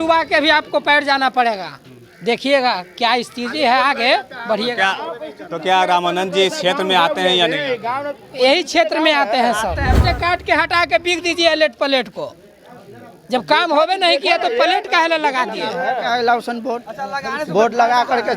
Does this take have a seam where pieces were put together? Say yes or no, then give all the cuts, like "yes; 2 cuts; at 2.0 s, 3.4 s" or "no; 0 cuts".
yes; 1 cut; at 10.0 s